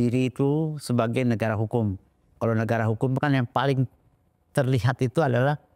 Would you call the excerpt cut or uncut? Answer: uncut